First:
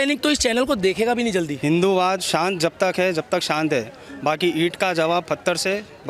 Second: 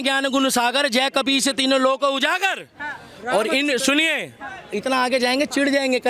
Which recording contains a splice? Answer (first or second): first